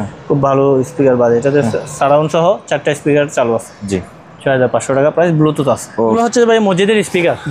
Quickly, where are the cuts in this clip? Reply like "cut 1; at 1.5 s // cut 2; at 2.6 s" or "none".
cut 1; at 6.1 s